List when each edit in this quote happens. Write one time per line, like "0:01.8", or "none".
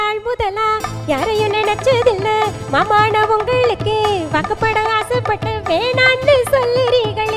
none